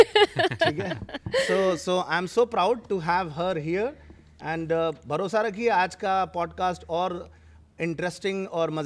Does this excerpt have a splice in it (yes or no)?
no